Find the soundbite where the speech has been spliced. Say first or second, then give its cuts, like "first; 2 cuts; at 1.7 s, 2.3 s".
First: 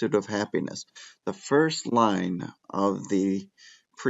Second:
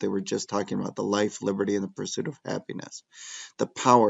first; 1 cut; at 1.9 s